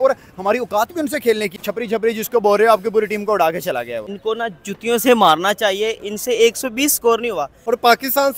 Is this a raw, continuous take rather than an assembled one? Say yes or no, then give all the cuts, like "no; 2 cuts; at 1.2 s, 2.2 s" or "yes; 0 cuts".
no; 3 cuts; at 1.5 s, 4.0 s, 7.6 s